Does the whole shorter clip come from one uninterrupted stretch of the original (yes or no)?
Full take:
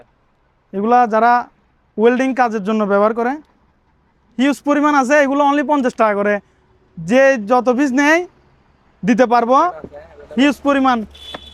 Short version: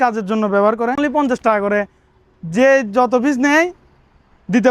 no